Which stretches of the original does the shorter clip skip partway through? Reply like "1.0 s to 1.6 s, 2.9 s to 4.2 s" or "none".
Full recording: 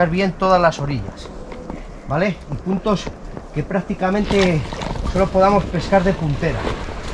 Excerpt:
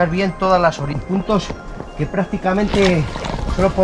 0.9 s to 2.5 s